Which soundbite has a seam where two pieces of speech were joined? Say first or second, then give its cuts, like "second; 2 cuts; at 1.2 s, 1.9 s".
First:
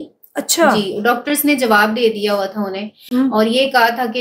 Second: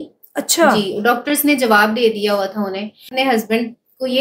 second; 1 cut; at 3.1 s